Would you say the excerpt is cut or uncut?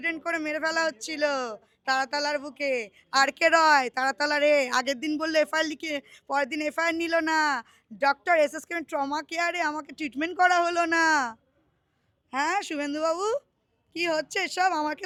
uncut